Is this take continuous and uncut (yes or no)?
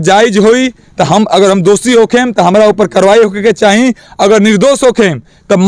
yes